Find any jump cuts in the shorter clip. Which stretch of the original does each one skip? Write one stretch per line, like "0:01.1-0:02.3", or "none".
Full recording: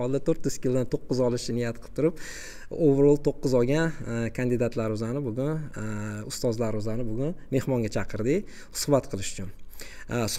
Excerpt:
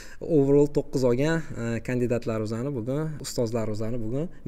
0:05.7-0:06.3